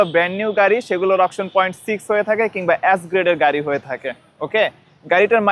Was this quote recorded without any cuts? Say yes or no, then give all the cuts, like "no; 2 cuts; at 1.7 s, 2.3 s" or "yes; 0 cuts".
yes; 0 cuts